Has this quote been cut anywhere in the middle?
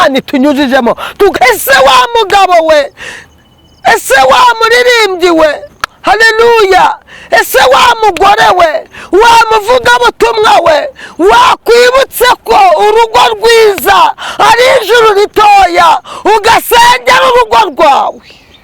yes; 1 cut; at 1.3 s

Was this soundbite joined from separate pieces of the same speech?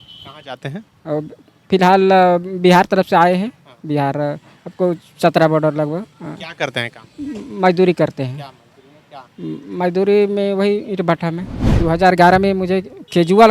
yes; 1 cut; at 11.7 s

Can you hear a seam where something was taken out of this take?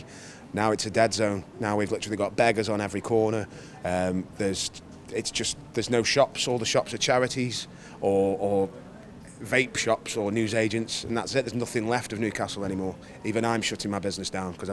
no; 0 cuts

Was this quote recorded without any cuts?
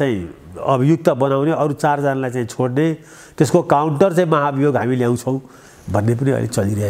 yes; 0 cuts

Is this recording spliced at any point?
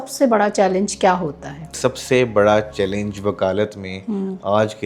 yes; 1 cut; at 1.7 s

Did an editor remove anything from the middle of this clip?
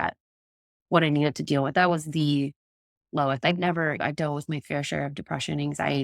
no; 0 cuts

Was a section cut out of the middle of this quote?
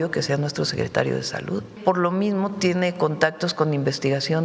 yes; 1 cut; at 1.7 s

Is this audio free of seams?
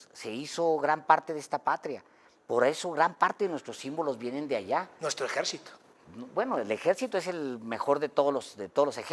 yes; 0 cuts

